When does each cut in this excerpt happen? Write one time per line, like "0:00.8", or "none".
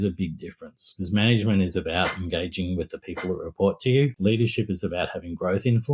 0:04.1